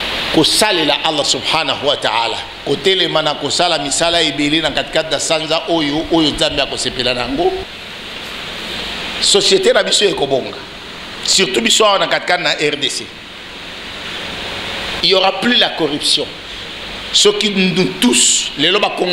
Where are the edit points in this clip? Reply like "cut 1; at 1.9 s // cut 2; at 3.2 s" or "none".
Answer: cut 1; at 7.6 s